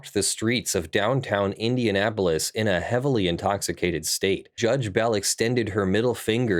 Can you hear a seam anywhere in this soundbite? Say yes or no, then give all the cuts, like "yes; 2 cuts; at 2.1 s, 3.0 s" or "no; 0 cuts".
yes; 1 cut; at 4.6 s